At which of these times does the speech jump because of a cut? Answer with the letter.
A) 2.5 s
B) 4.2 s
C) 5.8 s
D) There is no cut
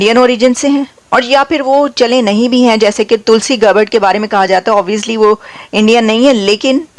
D